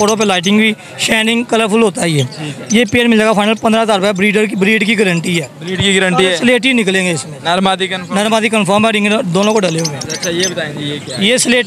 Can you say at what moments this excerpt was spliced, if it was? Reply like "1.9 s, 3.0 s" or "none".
none